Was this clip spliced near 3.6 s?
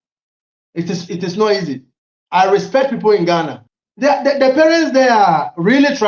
yes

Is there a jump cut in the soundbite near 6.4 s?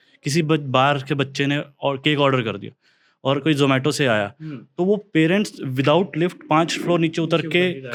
no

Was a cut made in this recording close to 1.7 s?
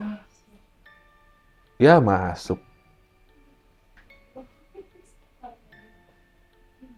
no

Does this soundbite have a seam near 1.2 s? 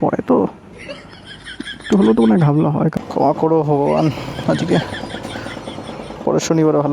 no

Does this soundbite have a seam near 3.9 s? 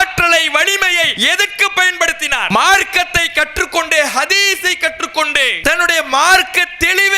no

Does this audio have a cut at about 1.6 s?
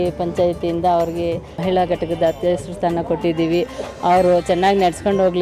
yes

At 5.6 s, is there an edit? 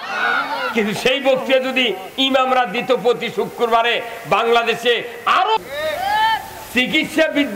yes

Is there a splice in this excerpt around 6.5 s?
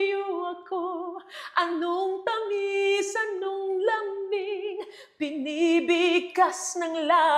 no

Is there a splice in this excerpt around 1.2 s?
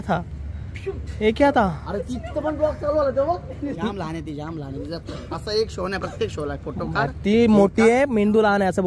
no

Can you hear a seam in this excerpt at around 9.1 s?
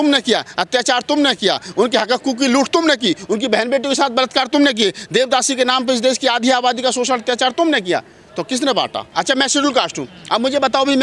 yes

